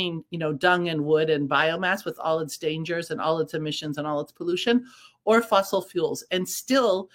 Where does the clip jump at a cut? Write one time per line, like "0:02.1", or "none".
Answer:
none